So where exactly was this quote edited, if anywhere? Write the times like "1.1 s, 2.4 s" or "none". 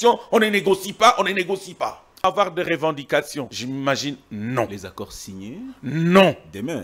2.2 s, 3.6 s